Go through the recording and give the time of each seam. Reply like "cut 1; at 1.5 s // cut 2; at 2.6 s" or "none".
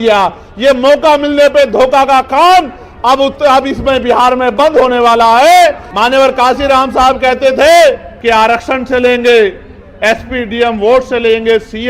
cut 1; at 5.9 s // cut 2; at 8.1 s